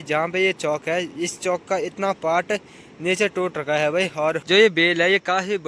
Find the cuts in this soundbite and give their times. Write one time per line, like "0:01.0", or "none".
0:04.4